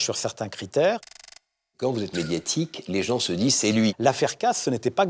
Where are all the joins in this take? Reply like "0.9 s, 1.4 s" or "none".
1.4 s, 4.0 s